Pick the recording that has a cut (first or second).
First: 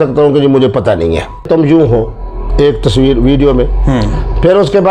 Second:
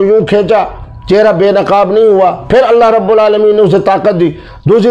first